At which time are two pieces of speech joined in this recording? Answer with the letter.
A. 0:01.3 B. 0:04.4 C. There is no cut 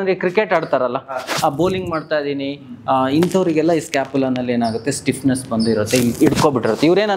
C